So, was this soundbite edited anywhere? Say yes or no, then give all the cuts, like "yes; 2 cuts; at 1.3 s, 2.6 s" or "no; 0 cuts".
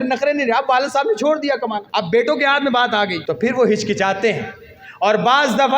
yes; 2 cuts; at 1.8 s, 3.2 s